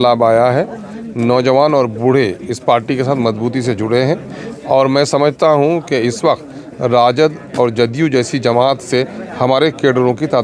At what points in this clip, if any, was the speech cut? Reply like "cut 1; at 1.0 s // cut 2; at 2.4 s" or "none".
none